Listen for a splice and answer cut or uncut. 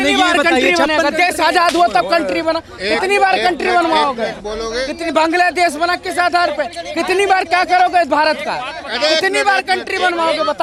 uncut